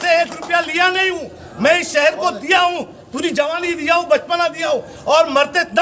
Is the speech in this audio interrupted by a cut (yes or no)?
no